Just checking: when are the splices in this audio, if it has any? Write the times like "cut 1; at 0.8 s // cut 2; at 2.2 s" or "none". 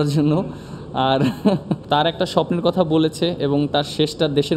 cut 1; at 1.7 s